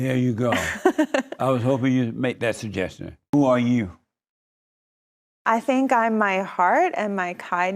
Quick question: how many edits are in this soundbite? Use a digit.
1